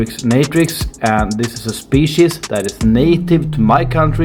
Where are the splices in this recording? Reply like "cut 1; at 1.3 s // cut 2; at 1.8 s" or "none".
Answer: none